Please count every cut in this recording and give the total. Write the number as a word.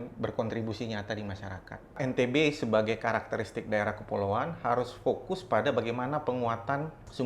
one